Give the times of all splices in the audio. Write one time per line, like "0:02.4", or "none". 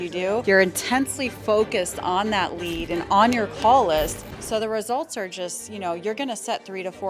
none